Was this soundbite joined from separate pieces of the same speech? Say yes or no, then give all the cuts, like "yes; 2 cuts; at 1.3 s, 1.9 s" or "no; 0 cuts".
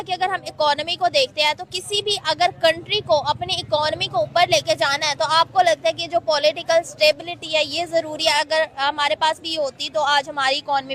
no; 0 cuts